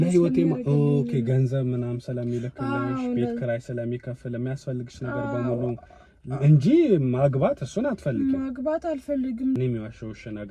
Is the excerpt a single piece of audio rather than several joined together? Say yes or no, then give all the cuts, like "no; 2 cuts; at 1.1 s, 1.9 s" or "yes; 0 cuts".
no; 1 cut; at 9.6 s